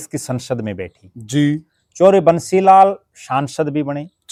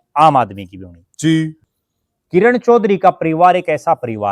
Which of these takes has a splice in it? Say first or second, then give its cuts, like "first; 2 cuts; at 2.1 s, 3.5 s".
second; 1 cut; at 1.6 s